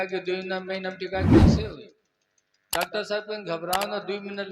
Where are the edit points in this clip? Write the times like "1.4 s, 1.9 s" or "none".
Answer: 1.2 s, 1.6 s